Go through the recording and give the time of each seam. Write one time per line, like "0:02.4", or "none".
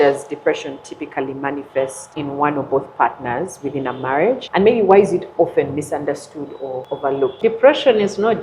0:02.0
0:04.4
0:07.3